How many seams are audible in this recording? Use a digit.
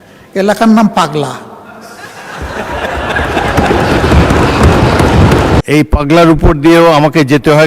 1